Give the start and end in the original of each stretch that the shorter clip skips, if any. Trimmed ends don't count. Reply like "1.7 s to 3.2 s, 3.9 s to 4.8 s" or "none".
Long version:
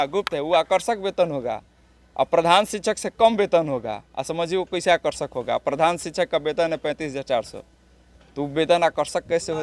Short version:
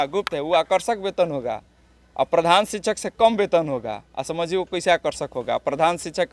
none